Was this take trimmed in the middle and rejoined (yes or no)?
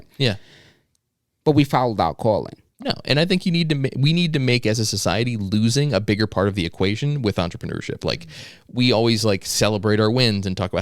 yes